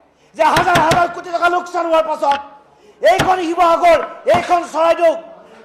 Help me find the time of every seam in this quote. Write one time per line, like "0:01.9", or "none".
none